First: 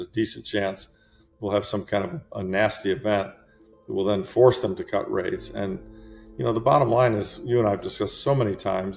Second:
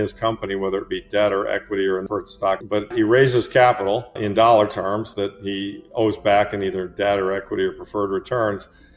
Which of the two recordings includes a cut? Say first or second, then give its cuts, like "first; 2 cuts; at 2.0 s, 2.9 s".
second; 2 cuts; at 2.9 s, 4.2 s